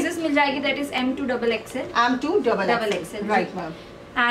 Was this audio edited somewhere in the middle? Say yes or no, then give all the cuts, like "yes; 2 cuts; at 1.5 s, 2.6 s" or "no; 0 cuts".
no; 0 cuts